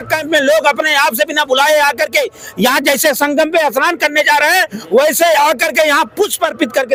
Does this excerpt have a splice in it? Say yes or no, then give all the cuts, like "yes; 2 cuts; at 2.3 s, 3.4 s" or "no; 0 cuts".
no; 0 cuts